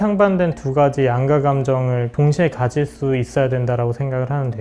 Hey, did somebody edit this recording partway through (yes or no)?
yes